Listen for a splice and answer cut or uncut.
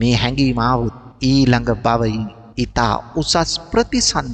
cut